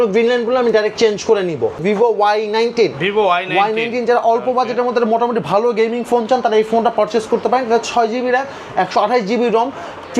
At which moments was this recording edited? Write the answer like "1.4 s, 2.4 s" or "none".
1.8 s